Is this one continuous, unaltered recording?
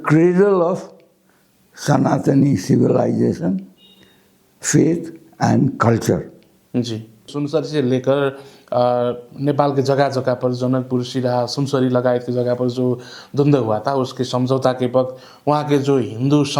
no; 1 cut; at 7.3 s

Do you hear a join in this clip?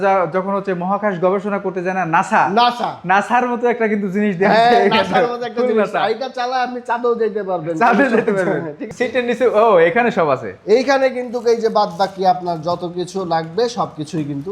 yes; 1 cut; at 8.9 s

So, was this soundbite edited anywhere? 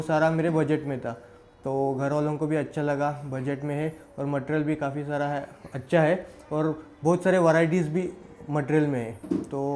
no; 0 cuts

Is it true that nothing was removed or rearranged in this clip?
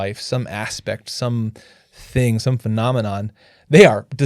yes; 0 cuts

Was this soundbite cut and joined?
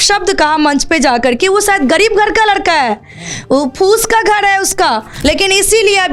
yes; 1 cut; at 5.1 s

